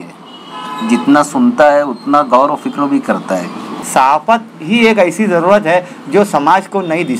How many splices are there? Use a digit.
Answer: 1